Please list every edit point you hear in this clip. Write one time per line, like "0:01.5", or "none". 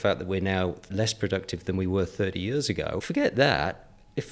0:00.9
0:03.0